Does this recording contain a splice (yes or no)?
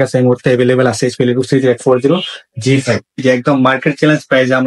yes